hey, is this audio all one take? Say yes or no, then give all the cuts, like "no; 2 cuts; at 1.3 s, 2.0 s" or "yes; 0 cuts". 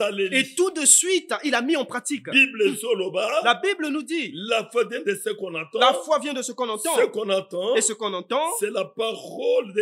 yes; 0 cuts